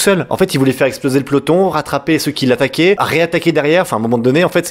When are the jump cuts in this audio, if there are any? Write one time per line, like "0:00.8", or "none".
0:03.0